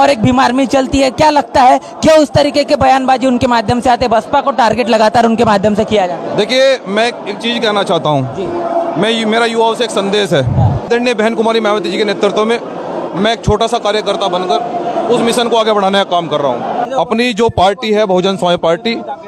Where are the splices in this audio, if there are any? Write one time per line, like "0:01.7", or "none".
0:10.9
0:16.9